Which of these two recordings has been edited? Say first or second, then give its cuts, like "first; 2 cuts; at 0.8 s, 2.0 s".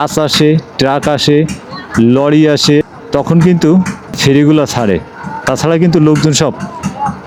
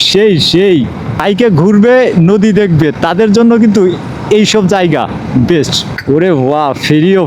second; 2 cuts; at 1.2 s, 5.9 s